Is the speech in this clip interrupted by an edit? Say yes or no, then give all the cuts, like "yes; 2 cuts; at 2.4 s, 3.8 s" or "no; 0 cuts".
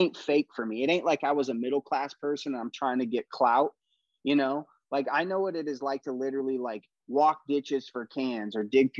no; 0 cuts